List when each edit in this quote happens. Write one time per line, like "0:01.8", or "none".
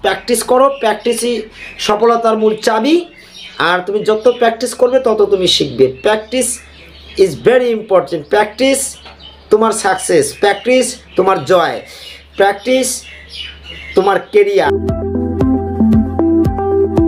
none